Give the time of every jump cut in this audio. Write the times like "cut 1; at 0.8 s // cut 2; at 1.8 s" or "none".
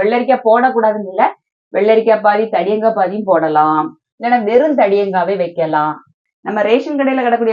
cut 1; at 6.2 s